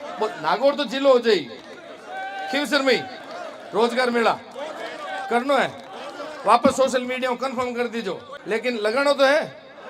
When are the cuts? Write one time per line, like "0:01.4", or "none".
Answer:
0:08.3